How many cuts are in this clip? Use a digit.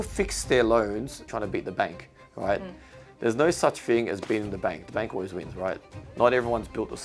2